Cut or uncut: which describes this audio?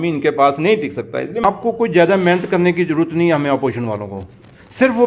cut